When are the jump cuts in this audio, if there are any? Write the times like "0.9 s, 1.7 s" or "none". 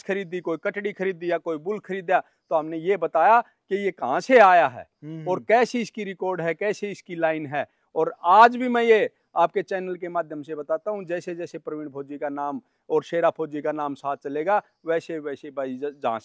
none